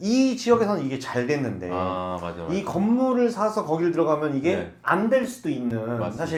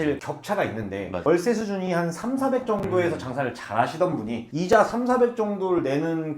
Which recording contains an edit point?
second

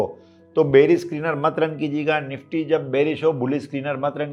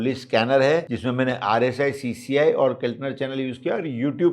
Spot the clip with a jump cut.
second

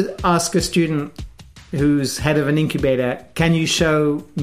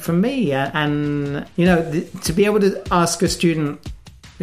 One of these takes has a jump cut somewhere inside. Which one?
second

